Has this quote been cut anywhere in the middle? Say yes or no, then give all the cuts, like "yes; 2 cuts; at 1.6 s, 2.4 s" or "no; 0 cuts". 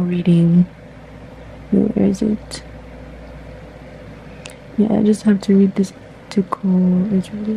no; 0 cuts